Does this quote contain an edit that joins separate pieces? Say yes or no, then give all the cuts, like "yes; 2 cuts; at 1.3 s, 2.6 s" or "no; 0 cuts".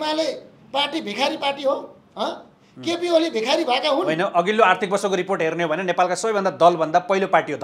no; 0 cuts